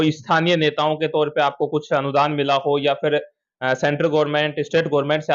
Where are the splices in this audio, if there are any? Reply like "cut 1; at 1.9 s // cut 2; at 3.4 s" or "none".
none

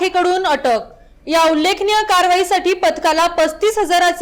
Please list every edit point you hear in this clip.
none

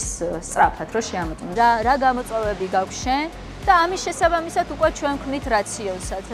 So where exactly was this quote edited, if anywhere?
cut 1; at 1.5 s

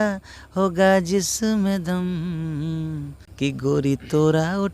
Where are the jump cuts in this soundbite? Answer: cut 1; at 3.2 s

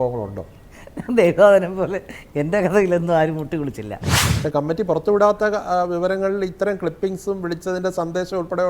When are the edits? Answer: cut 1; at 4.3 s

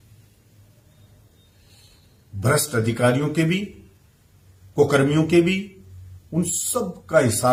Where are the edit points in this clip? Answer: none

